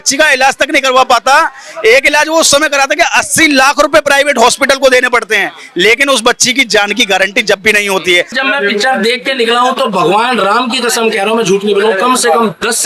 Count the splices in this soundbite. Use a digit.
1